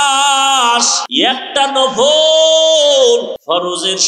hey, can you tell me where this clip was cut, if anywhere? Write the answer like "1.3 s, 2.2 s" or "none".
1.0 s, 3.3 s